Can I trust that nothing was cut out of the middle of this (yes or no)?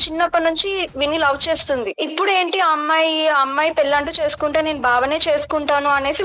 no